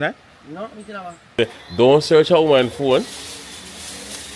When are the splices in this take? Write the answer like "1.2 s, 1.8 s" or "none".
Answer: 1.3 s